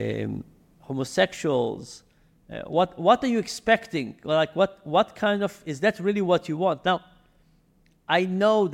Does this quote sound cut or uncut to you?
uncut